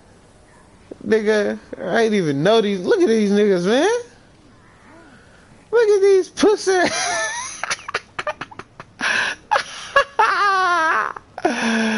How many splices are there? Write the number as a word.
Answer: zero